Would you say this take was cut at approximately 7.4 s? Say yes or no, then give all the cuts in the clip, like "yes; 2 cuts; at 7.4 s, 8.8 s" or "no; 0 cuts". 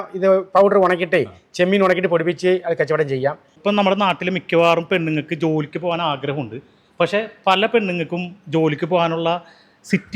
no; 1 cut; at 3.5 s